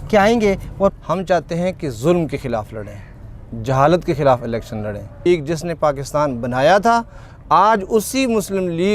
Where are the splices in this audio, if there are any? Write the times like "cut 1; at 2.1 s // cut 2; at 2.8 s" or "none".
cut 1; at 0.9 s // cut 2; at 5.2 s